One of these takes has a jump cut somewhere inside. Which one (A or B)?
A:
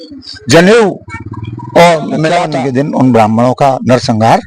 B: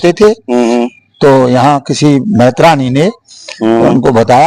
A